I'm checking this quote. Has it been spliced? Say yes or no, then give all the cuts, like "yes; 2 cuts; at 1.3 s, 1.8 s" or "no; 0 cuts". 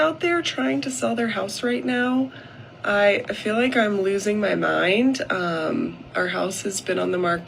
no; 0 cuts